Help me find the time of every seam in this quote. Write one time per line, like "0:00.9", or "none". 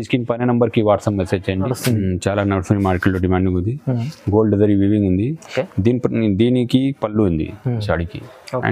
0:01.7